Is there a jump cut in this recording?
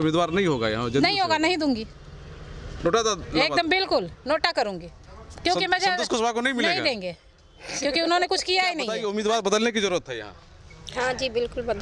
yes; 1 cut; at 9.0 s

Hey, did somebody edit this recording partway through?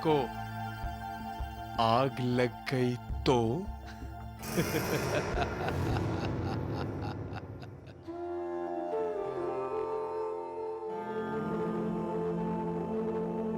no; 0 cuts

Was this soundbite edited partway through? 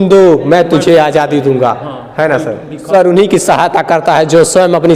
yes; 1 cut; at 2.9 s

